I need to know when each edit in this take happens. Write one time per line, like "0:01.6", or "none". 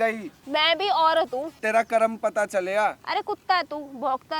0:01.5